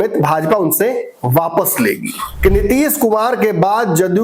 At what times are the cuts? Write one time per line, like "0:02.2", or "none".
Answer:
0:02.3